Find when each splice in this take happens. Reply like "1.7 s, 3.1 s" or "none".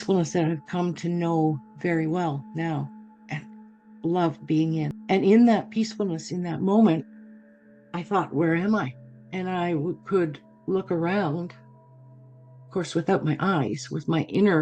4.9 s